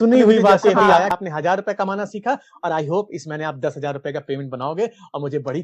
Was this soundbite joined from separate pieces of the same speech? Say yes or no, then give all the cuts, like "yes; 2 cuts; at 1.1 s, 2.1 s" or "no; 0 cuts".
yes; 1 cut; at 1.1 s